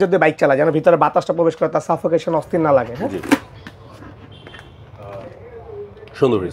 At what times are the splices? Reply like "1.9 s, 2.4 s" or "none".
3.5 s